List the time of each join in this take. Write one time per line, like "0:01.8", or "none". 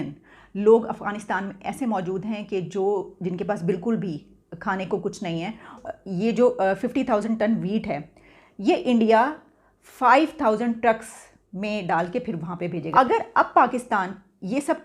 0:05.8
0:12.9

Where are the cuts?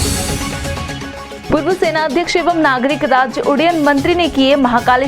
0:00.9

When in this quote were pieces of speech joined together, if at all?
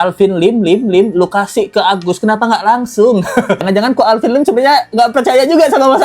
0:03.6

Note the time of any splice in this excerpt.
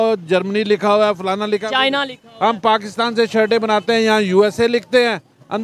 none

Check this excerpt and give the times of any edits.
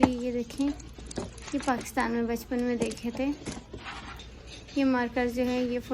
0:04.2

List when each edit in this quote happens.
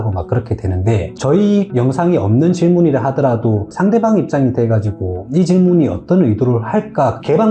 0:01.1
0:03.7

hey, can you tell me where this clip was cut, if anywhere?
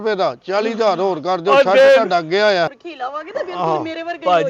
0:02.7

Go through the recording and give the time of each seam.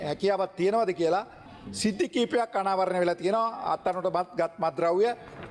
0:01.4

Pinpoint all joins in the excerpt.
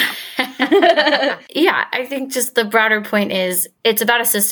0:01.4
0:03.7

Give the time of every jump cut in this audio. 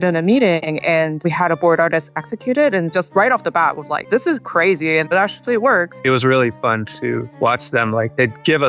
0:05.9

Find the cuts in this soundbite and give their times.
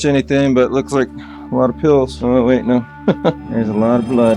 0:02.1
0:03.4

